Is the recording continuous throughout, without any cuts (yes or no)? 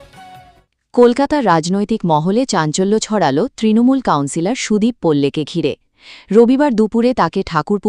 no